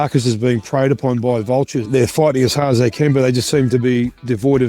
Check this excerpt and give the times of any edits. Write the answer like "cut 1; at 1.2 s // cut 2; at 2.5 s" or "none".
cut 1; at 1.9 s